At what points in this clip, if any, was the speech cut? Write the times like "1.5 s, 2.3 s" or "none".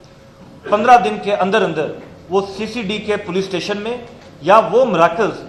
none